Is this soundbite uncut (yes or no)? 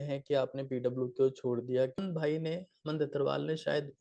no